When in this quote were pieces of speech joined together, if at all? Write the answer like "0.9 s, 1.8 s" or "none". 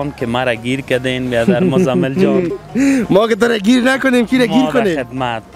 none